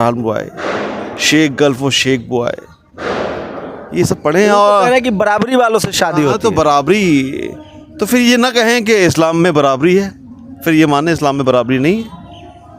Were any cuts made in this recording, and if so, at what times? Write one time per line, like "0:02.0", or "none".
none